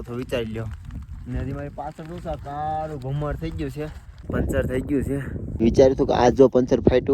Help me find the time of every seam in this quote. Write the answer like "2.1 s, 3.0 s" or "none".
4.2 s, 5.6 s